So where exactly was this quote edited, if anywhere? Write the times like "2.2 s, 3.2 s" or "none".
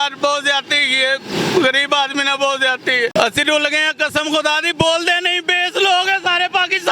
3.1 s